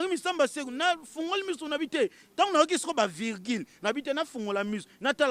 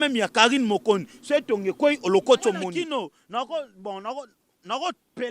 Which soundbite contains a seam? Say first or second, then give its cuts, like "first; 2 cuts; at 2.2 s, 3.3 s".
second; 1 cut; at 2.7 s